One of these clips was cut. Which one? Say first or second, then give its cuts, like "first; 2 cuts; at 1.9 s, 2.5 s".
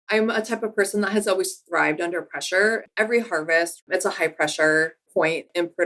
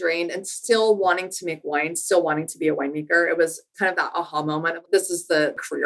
second; 1 cut; at 4.7 s